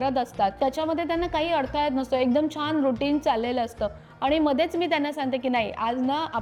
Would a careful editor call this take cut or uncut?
uncut